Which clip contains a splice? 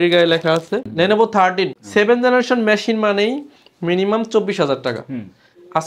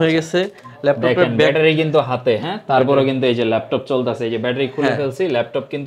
first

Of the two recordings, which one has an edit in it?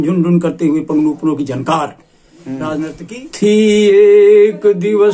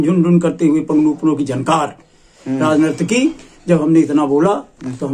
first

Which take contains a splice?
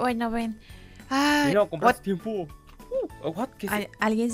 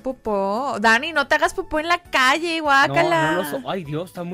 second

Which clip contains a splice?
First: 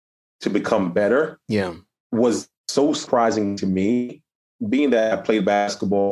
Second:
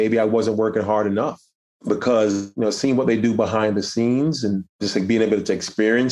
second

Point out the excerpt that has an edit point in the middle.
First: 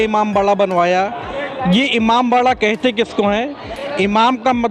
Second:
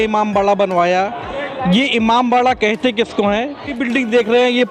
second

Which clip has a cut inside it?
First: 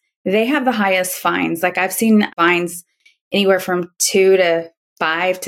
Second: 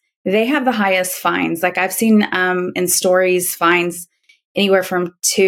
first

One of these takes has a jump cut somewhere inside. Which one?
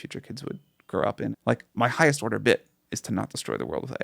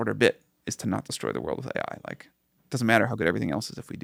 first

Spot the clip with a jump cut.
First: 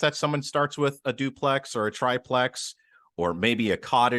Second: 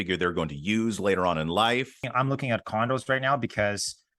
second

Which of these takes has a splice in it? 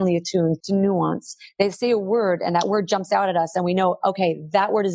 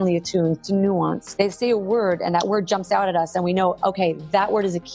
second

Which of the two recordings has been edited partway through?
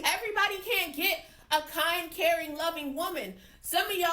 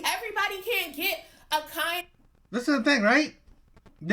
first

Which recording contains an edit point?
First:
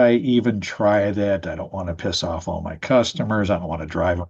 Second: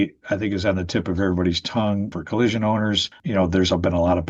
second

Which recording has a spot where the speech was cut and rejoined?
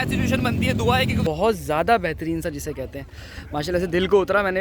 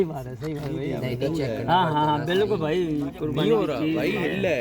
first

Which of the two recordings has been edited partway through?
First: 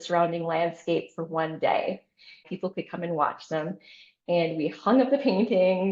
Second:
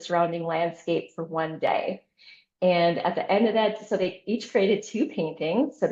first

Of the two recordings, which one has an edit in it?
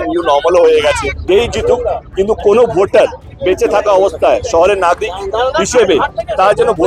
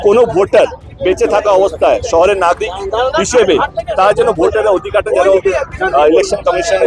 first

